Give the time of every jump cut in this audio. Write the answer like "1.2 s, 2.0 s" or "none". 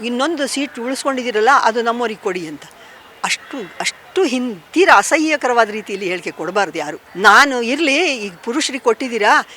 7.0 s